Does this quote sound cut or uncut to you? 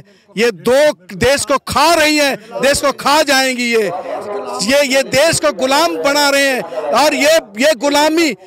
uncut